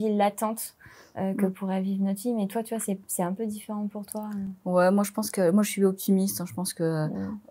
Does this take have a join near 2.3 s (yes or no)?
no